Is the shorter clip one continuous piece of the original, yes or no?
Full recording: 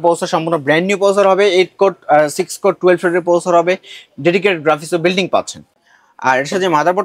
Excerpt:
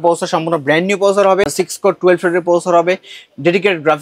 no